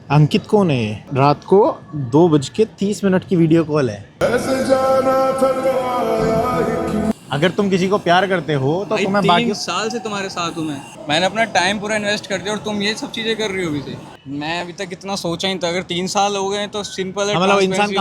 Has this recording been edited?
yes; 4 cuts; at 1.0 s, 7.2 s, 10.9 s, 14.1 s

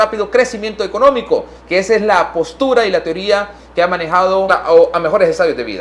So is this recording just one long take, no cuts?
yes; 0 cuts

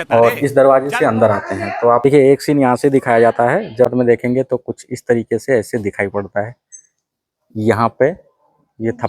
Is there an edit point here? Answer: yes; 2 cuts; at 2.0 s, 3.9 s

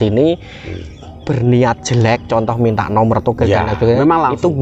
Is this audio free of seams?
yes; 0 cuts

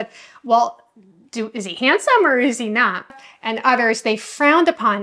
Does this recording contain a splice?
yes; 1 cut; at 3.1 s

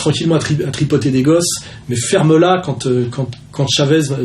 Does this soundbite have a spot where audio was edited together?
yes; 1 cut; at 1.8 s

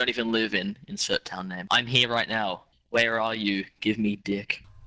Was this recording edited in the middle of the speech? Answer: yes; 2 cuts; at 1.6 s, 2.6 s

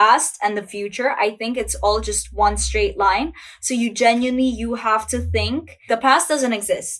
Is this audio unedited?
yes; 0 cuts

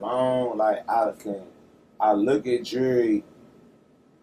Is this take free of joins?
yes; 0 cuts

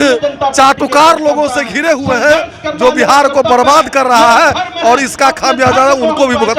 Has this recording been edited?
no; 0 cuts

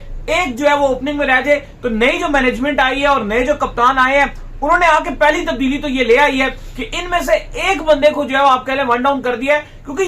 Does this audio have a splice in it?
no; 0 cuts

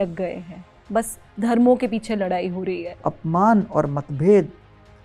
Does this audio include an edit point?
yes; 1 cut; at 3.0 s

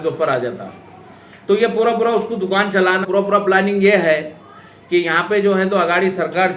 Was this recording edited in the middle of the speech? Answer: yes; 1 cut; at 3.0 s

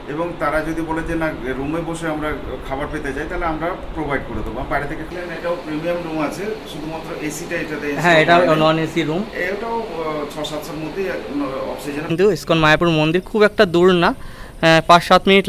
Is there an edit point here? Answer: yes; 2 cuts; at 5.1 s, 12.1 s

